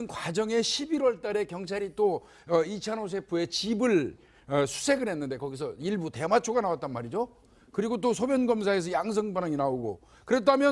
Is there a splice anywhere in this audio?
yes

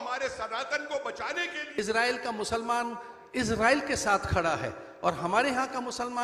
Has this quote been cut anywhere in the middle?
yes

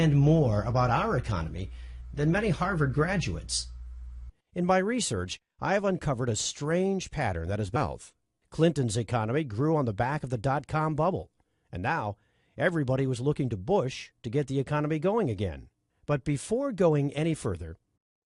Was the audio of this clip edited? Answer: no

